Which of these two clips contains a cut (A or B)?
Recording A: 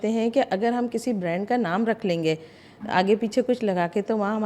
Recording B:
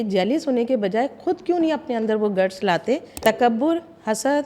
B